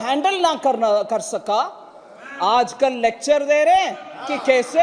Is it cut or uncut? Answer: uncut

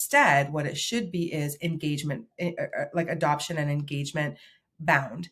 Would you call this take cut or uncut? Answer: uncut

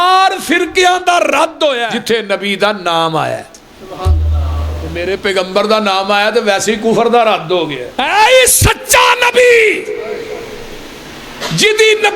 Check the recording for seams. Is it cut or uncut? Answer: cut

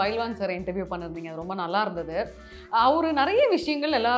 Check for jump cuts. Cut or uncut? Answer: uncut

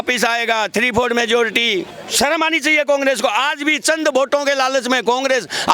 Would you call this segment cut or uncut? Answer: cut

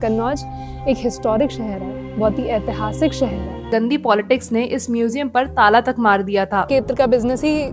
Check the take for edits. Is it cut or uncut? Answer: cut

